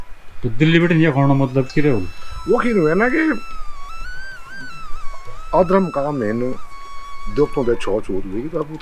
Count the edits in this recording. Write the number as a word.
zero